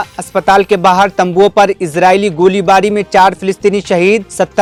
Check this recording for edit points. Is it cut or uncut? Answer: uncut